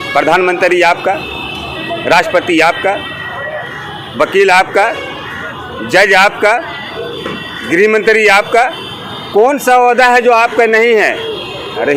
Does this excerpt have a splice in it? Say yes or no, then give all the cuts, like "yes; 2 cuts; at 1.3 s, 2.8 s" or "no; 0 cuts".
no; 0 cuts